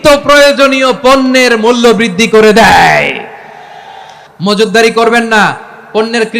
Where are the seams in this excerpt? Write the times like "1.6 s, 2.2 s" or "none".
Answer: 4.2 s